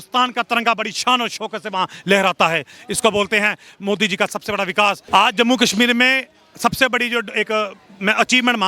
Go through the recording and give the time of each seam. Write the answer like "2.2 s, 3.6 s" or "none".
5.0 s